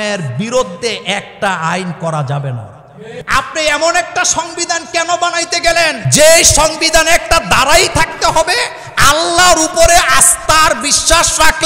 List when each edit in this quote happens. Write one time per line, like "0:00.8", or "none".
0:03.2
0:06.0